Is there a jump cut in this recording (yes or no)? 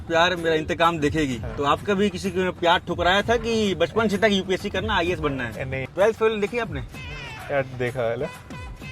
yes